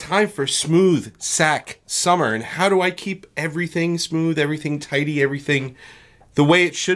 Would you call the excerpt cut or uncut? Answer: uncut